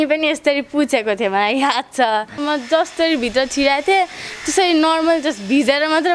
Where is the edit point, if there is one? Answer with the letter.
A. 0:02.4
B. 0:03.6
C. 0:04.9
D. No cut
A